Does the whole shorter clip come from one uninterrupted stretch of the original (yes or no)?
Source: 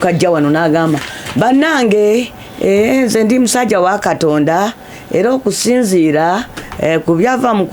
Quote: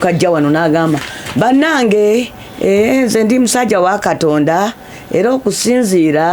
yes